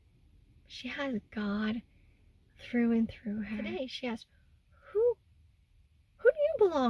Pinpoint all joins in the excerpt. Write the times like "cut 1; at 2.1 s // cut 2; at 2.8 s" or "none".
cut 1; at 3.7 s